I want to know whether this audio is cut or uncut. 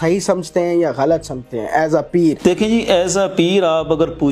cut